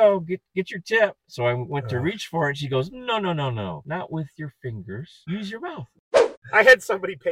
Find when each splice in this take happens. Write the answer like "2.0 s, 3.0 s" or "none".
3.8 s, 5.1 s, 6.3 s